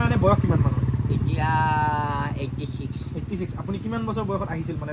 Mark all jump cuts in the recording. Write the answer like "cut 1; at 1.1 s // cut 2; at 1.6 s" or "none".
none